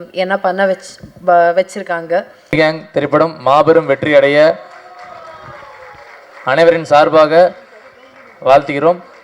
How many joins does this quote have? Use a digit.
1